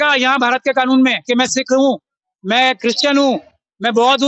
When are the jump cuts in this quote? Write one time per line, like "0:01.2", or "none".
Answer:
none